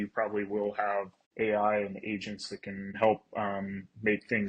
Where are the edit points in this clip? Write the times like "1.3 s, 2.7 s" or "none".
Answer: 1.2 s, 3.0 s